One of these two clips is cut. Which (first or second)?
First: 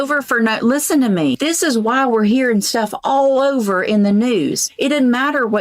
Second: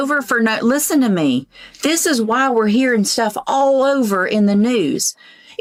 first